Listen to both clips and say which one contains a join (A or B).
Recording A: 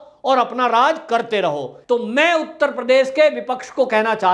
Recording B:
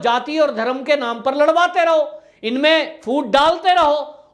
A